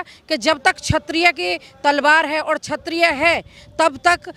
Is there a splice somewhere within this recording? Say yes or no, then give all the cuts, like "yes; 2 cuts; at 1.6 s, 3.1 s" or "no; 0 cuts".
no; 0 cuts